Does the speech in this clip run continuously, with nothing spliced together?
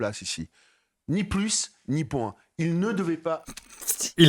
yes; 0 cuts

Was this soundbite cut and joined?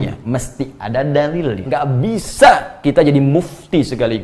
yes; 1 cut; at 1.6 s

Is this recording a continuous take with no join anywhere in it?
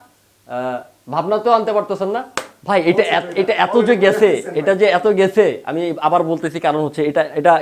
no; 1 cut; at 2.3 s

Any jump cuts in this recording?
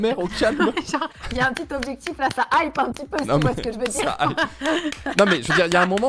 yes; 1 cut; at 1.1 s

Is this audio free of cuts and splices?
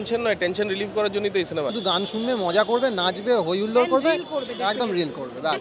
no; 1 cut; at 1.7 s

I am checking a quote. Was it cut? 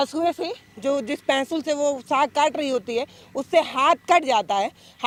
no; 0 cuts

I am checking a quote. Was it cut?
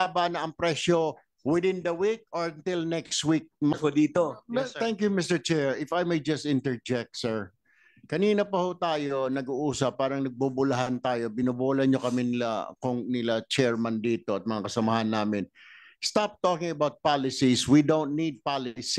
yes; 1 cut; at 3.8 s

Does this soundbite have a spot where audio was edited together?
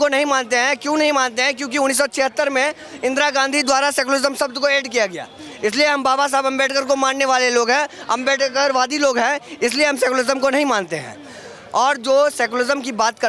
no; 0 cuts

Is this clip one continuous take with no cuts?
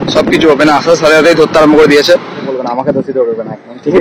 no; 1 cut; at 2.5 s

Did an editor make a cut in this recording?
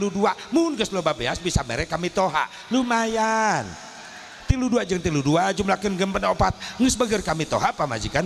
no; 0 cuts

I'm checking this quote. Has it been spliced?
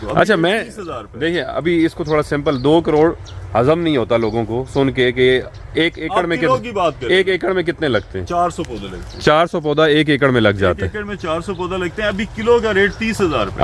no; 0 cuts

